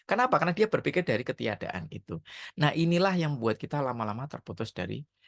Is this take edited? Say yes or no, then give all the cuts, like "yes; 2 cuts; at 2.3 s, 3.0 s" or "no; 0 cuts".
no; 0 cuts